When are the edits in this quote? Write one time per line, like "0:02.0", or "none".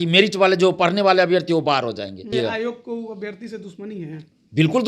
0:02.3